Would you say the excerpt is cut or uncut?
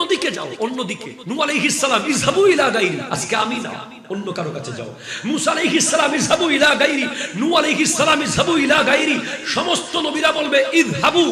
cut